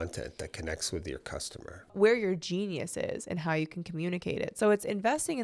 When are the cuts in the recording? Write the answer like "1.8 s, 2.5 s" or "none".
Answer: 1.8 s